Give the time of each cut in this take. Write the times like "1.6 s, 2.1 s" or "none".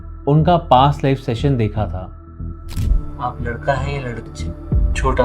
4.3 s